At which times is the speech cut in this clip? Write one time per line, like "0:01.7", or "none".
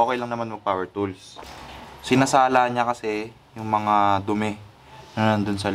0:01.4